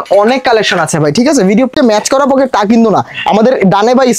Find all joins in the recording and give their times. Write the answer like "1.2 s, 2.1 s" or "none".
1.7 s

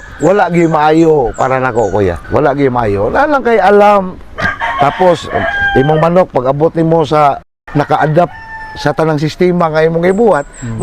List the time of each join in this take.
2.2 s, 7.7 s

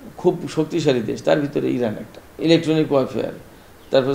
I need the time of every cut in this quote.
2.3 s

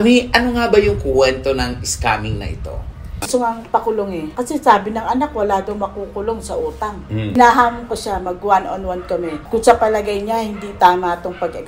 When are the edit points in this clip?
3.0 s, 7.3 s

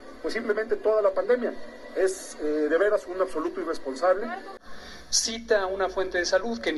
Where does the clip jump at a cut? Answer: 4.6 s

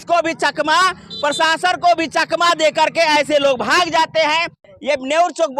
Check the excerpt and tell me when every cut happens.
4.6 s

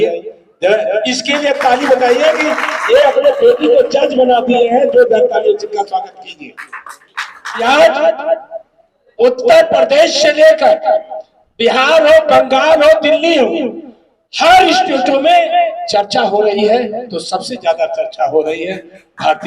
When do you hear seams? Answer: 7.6 s

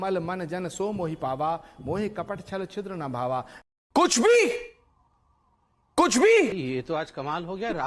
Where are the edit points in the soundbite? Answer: 6.5 s

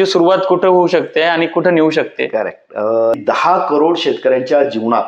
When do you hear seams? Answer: 3.2 s

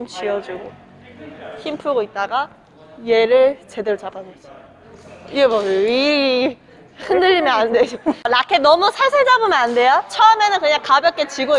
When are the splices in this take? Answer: 8.3 s

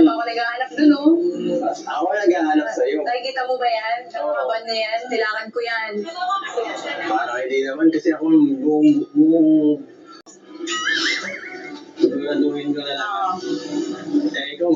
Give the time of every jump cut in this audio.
10.4 s

